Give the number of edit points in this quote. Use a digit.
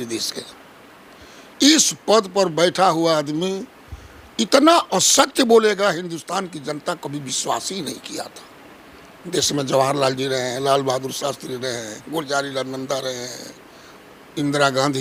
0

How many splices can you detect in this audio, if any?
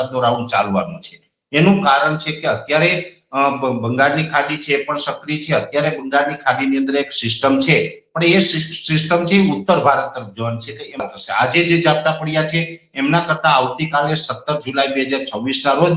1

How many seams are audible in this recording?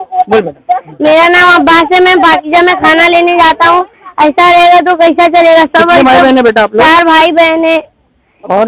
0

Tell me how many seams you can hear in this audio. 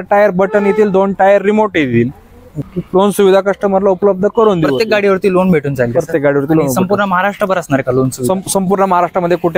1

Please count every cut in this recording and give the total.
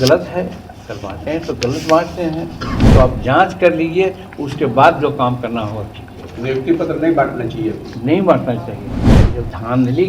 1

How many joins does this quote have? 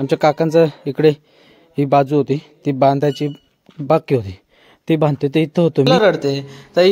1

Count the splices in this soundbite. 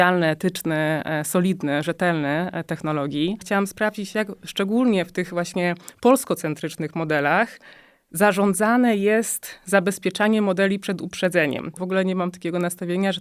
2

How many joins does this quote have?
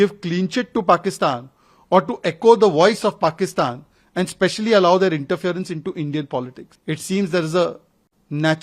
1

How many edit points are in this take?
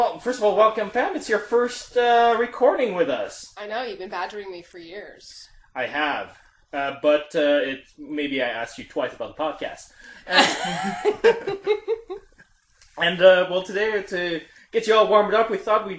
1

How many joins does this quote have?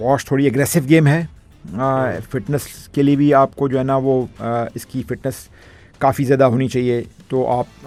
0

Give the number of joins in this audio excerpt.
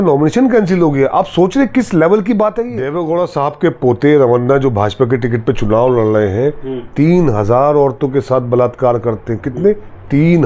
1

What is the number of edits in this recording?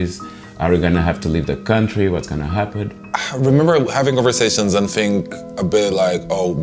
1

